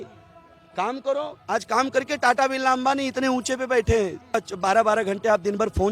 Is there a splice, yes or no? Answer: yes